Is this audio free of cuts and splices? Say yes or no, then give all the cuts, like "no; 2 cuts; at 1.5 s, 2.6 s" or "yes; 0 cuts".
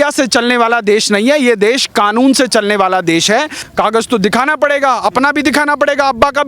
no; 1 cut; at 3.6 s